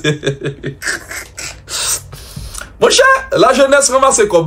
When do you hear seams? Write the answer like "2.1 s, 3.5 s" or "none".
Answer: 1.8 s